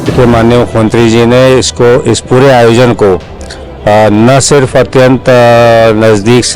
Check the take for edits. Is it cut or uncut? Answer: uncut